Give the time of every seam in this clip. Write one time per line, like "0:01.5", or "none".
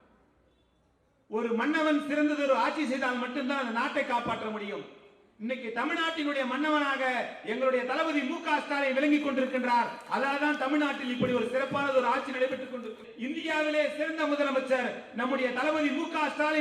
0:13.1